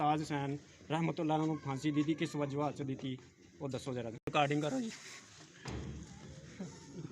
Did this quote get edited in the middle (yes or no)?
yes